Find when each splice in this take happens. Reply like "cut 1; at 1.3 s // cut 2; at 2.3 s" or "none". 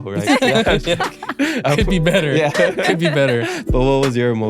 cut 1; at 3.6 s